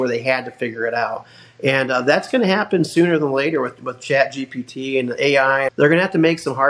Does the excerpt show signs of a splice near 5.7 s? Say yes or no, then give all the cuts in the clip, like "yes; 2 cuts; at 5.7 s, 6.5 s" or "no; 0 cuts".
yes; 1 cut; at 5.7 s